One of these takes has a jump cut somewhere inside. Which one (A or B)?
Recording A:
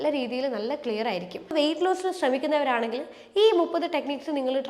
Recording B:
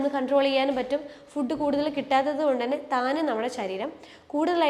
A